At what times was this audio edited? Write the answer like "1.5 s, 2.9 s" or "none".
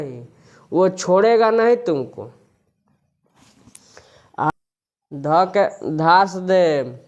4.5 s